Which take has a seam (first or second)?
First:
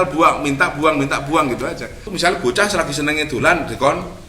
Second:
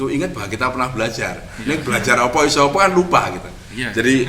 first